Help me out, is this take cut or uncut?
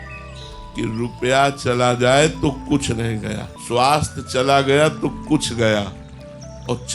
cut